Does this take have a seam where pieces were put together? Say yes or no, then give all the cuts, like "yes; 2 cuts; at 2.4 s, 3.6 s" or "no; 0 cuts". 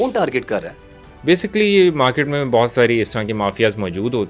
no; 0 cuts